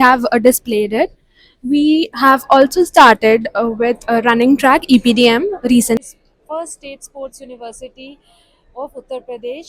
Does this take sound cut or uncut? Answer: cut